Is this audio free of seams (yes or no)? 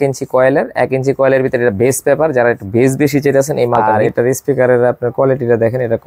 no